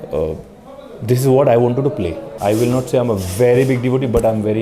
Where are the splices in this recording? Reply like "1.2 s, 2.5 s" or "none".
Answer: 2.3 s